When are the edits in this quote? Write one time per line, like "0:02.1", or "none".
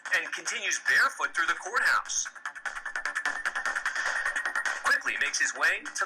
0:03.0